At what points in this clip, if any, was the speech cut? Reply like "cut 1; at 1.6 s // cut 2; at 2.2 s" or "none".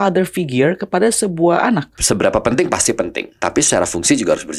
cut 1; at 1.9 s // cut 2; at 3.3 s